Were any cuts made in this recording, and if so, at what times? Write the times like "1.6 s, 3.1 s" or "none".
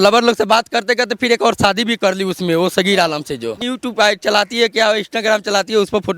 3.7 s